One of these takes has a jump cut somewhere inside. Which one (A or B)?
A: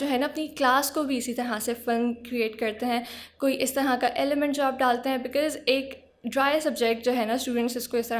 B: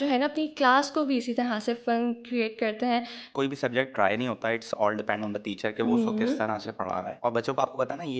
B